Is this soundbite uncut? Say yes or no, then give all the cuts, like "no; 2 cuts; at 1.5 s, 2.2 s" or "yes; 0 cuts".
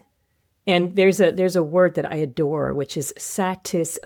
yes; 0 cuts